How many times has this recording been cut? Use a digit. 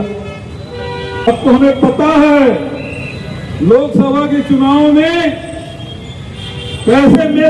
1